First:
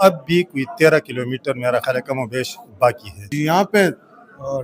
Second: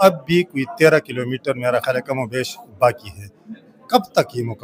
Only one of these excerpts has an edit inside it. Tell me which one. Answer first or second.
first